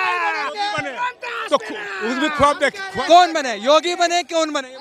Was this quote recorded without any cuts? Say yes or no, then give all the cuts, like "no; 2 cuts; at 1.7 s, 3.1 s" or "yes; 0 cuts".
yes; 0 cuts